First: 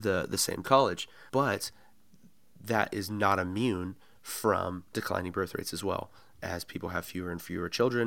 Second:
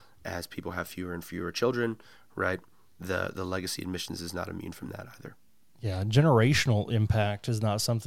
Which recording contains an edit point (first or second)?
first